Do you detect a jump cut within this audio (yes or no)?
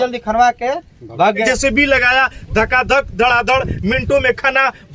yes